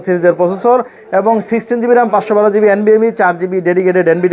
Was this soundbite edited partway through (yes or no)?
no